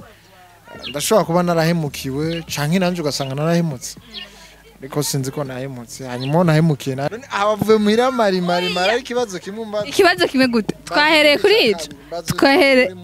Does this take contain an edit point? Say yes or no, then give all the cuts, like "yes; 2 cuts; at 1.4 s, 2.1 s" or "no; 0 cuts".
yes; 1 cut; at 7.0 s